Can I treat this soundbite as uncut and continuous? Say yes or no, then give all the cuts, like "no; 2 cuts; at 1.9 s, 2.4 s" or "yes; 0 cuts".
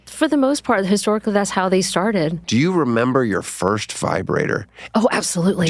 no; 1 cut; at 2.4 s